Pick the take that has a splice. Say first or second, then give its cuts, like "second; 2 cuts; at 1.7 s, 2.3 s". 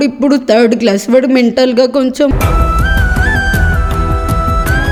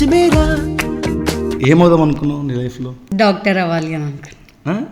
second; 2 cuts; at 1.5 s, 3.0 s